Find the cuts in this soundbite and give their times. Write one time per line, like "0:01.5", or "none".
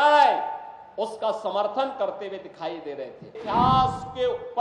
0:03.4